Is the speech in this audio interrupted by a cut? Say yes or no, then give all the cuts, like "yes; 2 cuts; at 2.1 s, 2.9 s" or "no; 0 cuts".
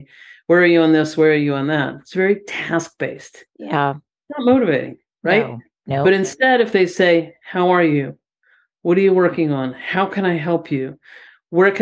no; 0 cuts